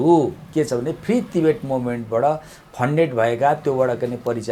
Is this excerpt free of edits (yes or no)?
yes